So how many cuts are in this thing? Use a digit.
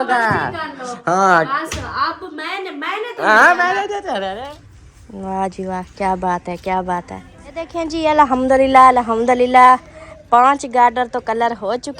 2